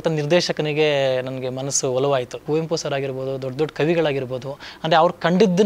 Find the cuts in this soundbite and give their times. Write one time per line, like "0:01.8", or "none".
0:02.4